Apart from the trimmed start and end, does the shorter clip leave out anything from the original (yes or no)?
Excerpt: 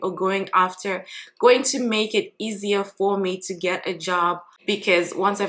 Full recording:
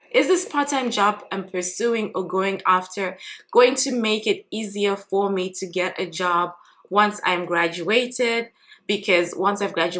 yes